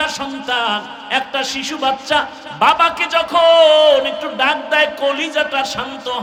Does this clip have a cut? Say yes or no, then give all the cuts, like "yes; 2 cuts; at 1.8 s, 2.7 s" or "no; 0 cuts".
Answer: no; 0 cuts